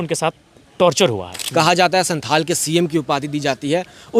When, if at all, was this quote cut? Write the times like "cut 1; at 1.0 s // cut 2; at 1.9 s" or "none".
cut 1; at 1.3 s

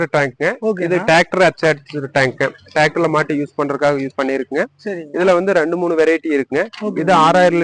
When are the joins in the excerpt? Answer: none

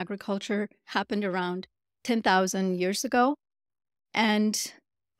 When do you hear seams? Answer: none

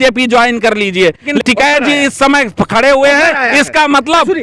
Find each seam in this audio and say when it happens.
cut 1; at 1.3 s

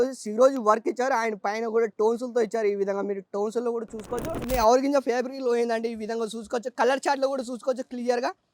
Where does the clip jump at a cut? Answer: cut 1; at 4.4 s

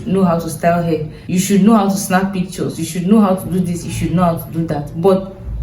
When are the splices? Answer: cut 1; at 1.2 s

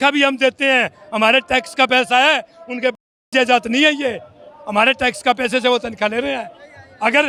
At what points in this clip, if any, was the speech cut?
none

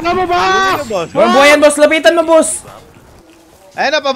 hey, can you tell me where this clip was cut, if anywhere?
none

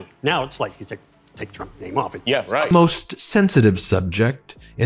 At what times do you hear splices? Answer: cut 1; at 2.7 s

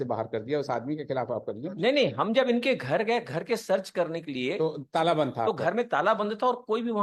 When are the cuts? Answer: none

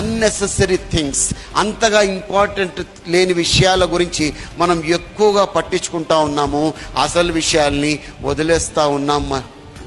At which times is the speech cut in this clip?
none

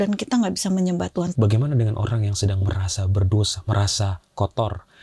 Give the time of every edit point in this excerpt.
cut 1; at 1.3 s

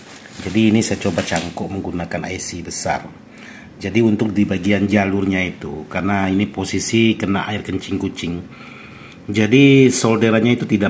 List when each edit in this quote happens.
none

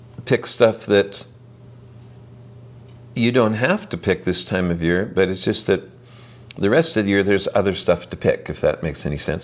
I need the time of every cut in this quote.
none

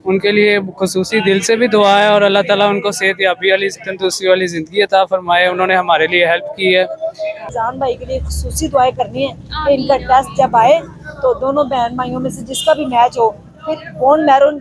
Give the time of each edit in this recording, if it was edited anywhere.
cut 1; at 7.4 s

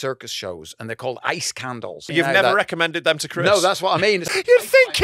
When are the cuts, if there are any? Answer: cut 1; at 2.0 s // cut 2; at 4.3 s

